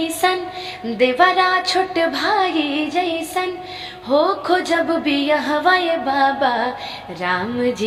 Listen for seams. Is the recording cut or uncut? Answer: uncut